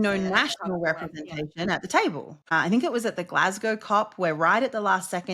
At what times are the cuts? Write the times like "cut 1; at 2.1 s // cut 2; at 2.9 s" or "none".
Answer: cut 1; at 2.4 s